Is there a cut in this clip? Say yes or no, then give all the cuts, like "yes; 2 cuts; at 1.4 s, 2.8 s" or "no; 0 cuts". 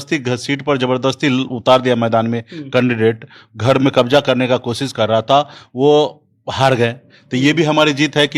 no; 0 cuts